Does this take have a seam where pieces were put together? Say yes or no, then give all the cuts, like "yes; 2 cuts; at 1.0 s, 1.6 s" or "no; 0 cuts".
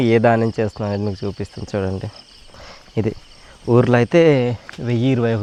no; 0 cuts